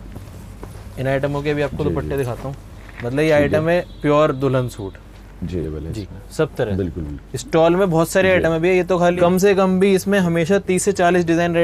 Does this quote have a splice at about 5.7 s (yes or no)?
yes